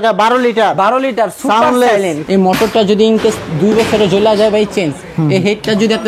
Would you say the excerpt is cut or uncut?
cut